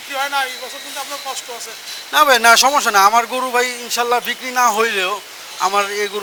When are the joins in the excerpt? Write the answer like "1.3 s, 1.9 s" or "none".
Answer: none

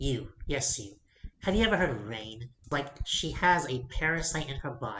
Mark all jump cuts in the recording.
2.7 s

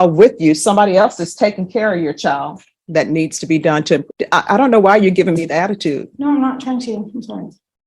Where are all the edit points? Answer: 2.8 s

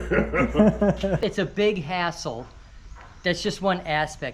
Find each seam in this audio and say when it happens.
1.2 s

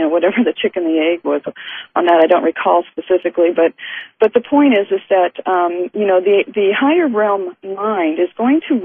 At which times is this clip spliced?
none

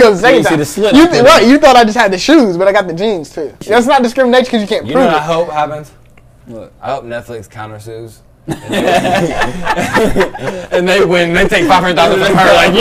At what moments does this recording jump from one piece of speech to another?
3.6 s

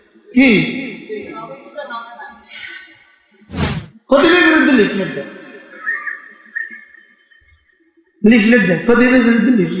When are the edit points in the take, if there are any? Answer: 3.7 s

